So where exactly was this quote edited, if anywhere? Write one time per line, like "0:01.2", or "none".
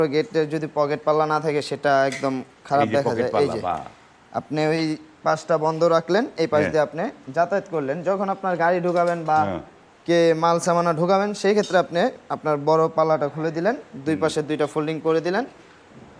none